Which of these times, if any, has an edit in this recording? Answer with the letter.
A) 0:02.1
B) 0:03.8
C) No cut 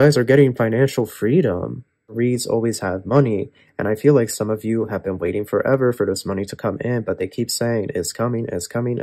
A